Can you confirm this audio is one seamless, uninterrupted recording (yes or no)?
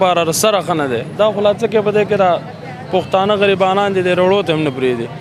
yes